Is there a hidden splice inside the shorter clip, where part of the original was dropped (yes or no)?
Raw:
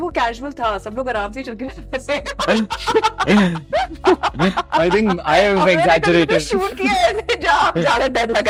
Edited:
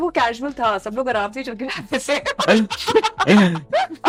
no